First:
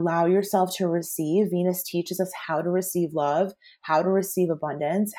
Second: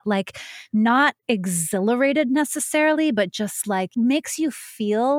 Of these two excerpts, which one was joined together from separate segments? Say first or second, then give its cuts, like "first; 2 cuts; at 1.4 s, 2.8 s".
second; 1 cut; at 3.9 s